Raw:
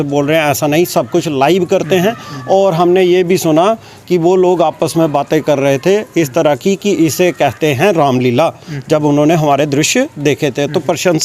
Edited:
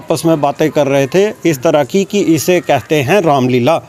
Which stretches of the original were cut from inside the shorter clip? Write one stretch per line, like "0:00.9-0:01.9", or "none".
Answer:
none